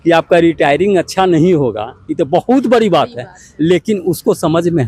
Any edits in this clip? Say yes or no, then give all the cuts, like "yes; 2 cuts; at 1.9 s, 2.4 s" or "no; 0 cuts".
no; 0 cuts